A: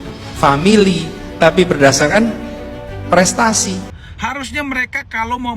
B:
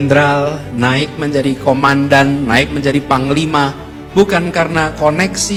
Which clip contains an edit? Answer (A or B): A